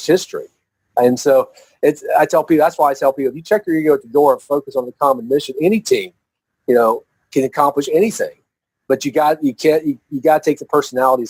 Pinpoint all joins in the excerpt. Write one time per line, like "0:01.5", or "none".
none

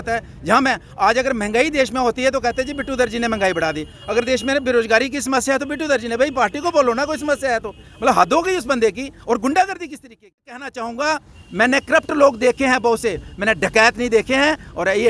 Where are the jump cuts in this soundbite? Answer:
0:10.7

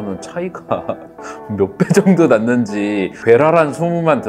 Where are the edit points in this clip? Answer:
none

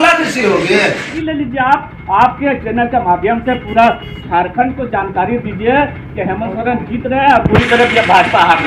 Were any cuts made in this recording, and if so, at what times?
0:01.1

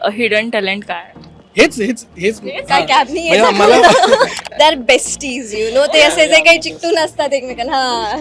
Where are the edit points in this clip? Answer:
0:04.4

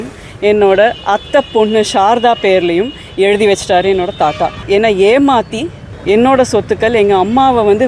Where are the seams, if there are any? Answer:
0:04.6

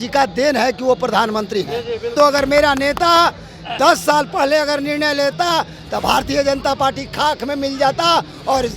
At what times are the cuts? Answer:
0:02.1

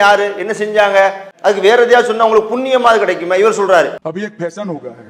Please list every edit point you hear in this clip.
0:01.3
0:04.0

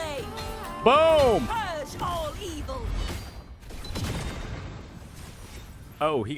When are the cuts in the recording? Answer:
none

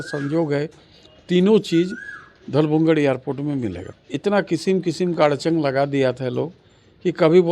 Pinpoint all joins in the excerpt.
none

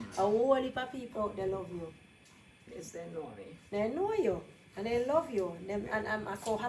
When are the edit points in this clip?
none

